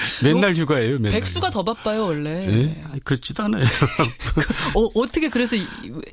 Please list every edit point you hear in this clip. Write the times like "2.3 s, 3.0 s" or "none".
3.3 s